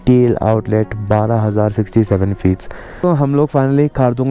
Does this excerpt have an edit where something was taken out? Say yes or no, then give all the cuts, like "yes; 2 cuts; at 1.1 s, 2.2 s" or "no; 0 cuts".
yes; 1 cut; at 3.0 s